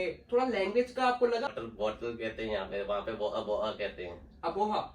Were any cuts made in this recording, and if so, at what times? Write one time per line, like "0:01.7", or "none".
0:01.5